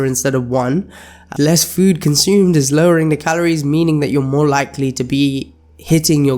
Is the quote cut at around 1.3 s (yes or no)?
yes